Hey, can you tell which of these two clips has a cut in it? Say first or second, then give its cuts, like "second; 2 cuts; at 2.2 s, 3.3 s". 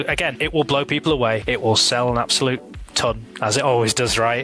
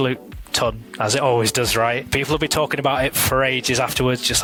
first; 1 cut; at 1.4 s